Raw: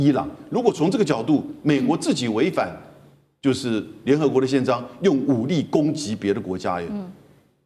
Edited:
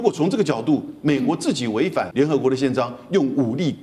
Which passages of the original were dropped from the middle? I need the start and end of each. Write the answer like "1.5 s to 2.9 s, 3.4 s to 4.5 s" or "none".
2.7 s to 4.0 s